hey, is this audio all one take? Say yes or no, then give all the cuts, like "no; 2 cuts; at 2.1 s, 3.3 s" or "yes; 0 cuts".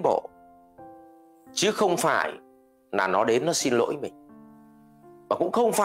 yes; 0 cuts